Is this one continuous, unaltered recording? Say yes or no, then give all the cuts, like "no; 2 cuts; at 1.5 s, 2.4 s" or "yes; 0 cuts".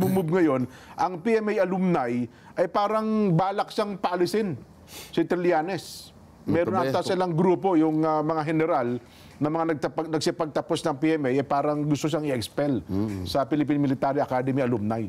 yes; 0 cuts